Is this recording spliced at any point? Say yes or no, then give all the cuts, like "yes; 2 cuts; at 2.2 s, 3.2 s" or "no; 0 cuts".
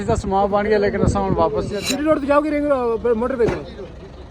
yes; 1 cut; at 1.8 s